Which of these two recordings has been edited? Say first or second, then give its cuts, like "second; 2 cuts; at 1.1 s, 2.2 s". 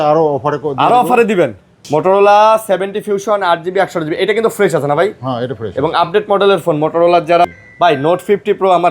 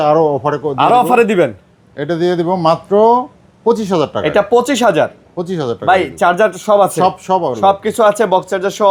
first; 2 cuts; at 1.8 s, 7.4 s